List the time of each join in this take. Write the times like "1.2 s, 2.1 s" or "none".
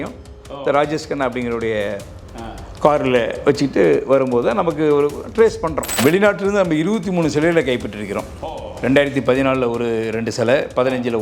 6.0 s

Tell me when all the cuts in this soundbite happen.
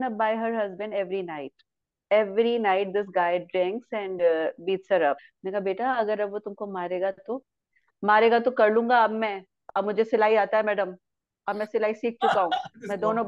5.3 s

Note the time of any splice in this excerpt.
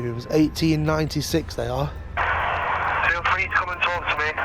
2.2 s

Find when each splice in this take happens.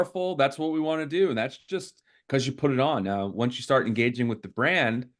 none

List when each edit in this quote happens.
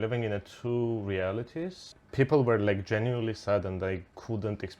1.9 s

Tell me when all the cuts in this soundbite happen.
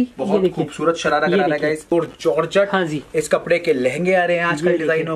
1.9 s

